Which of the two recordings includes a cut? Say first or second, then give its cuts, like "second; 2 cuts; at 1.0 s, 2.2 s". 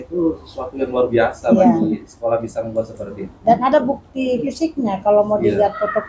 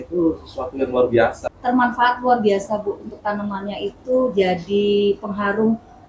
second; 1 cut; at 1.4 s